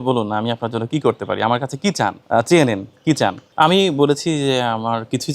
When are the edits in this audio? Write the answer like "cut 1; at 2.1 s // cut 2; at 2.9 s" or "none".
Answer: cut 1; at 2.2 s // cut 2; at 3.4 s